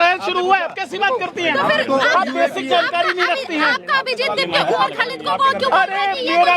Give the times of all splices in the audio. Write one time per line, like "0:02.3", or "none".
none